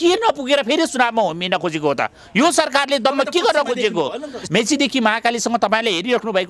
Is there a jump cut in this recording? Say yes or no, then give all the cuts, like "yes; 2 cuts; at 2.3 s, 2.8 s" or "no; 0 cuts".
yes; 1 cut; at 4.4 s